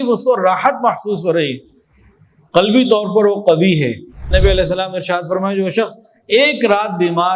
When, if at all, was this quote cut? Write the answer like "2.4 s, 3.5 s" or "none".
4.3 s